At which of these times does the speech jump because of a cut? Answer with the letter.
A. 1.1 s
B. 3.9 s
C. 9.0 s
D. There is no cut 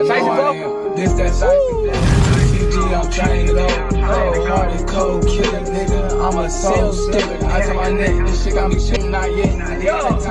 C